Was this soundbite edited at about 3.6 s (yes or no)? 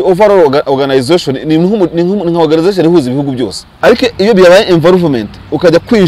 yes